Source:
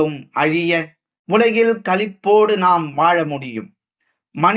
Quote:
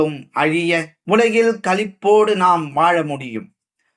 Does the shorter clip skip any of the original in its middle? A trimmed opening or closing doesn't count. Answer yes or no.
yes